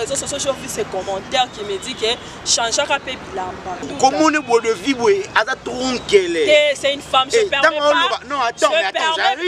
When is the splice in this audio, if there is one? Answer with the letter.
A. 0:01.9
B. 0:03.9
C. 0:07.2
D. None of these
B